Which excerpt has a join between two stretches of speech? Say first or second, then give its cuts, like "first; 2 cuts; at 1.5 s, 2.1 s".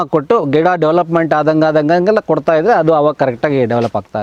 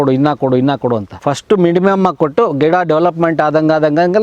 second; 1 cut; at 1.1 s